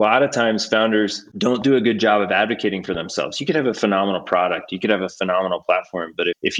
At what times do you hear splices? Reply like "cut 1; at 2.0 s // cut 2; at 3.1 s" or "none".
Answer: cut 1; at 1.2 s